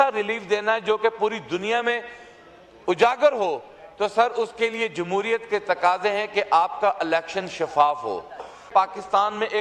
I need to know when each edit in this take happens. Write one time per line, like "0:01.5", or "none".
0:08.7

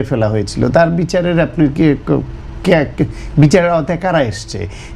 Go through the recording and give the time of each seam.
none

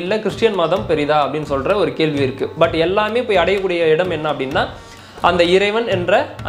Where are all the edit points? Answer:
0:02.5

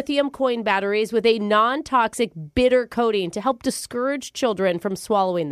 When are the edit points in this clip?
none

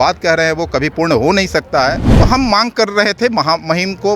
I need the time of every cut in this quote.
0:02.1

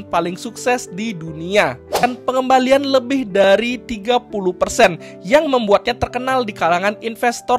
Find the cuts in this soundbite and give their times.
0:02.0

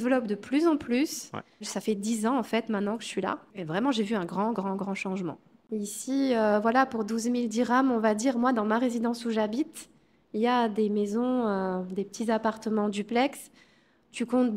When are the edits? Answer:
0:01.7
0:03.5
0:05.6

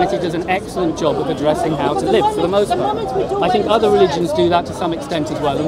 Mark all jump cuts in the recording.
none

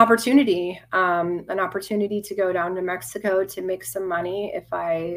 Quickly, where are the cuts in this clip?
none

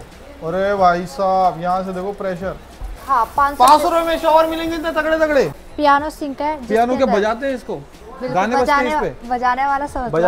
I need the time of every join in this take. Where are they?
0:03.0
0:05.6

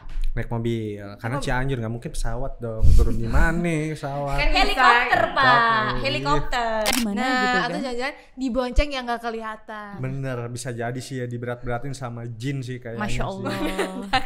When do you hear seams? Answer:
0:06.9

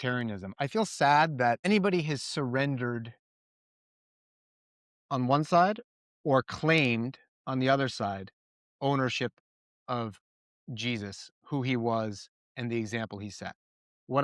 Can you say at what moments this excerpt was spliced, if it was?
0:01.6

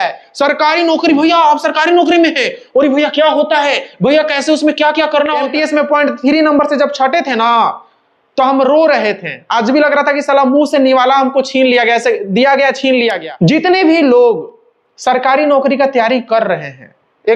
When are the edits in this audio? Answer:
0:05.4
0:13.2

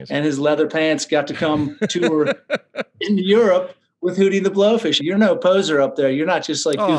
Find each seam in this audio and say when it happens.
0:04.9

